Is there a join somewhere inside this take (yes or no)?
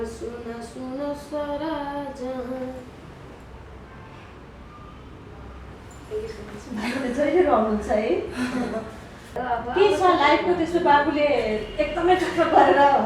yes